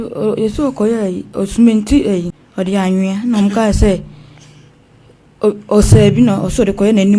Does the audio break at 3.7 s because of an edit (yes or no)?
no